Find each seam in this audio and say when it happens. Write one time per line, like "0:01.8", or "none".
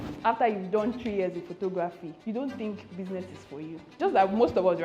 0:02.1
0:04.0